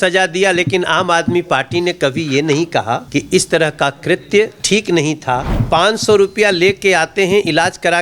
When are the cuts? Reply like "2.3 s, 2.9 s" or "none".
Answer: 3.0 s, 4.6 s, 5.5 s